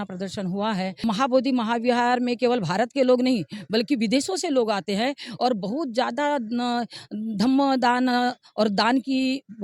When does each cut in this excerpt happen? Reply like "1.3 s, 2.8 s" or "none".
1.0 s